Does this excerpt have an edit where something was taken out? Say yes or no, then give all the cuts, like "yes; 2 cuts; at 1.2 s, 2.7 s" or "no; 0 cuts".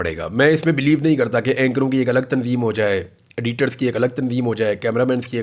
no; 0 cuts